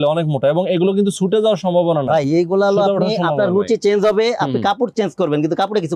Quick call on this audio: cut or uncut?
uncut